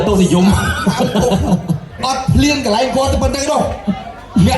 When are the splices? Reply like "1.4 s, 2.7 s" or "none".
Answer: 2.0 s

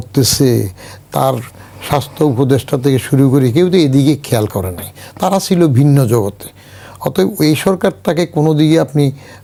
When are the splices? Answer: none

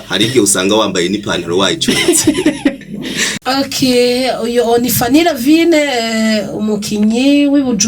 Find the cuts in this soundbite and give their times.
3.2 s

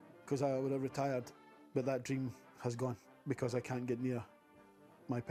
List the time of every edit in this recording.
none

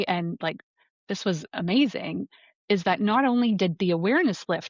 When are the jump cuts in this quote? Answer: none

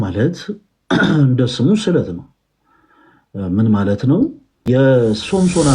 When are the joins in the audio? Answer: 4.6 s

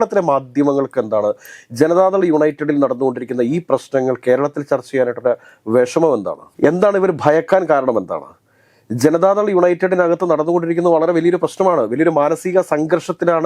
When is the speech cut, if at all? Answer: none

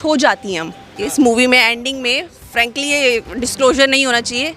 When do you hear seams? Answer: 0.9 s

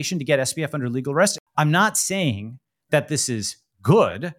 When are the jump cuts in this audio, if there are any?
1.4 s

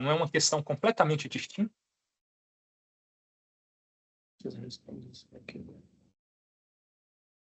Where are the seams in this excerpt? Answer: none

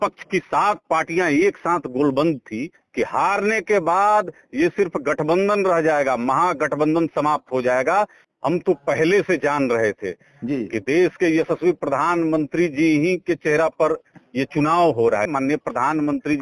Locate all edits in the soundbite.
2.8 s, 8.3 s, 15.3 s

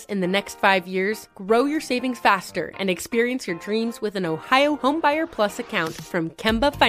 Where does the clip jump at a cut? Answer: none

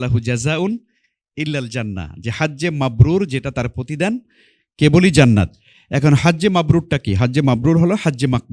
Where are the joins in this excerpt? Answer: none

